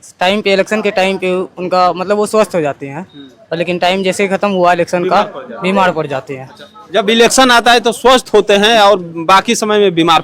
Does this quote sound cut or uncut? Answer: uncut